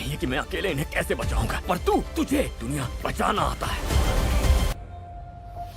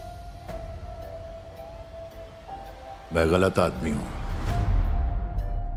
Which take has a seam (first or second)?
first